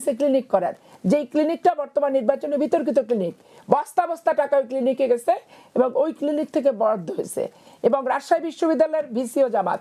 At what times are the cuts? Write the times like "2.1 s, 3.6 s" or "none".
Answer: none